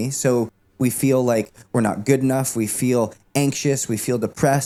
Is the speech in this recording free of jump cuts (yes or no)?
yes